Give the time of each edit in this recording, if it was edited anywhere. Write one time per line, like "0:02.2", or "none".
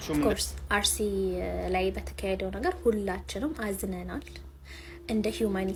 none